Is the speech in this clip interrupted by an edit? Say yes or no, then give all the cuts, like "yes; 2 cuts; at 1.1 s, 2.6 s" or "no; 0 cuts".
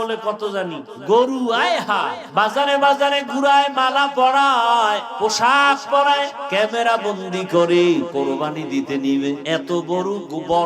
yes; 6 cuts; at 0.9 s, 2.2 s, 5.1 s, 6.4 s, 8.1 s, 9.4 s